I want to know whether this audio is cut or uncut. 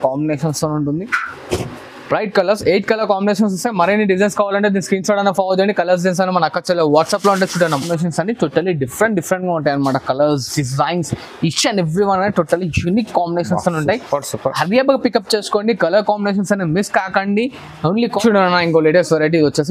cut